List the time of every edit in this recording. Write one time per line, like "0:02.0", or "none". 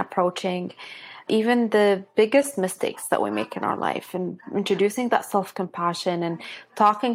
none